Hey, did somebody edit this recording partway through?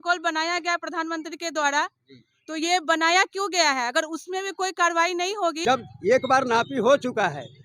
yes; 1 cut; at 5.6 s

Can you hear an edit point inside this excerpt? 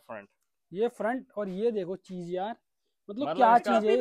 no; 0 cuts

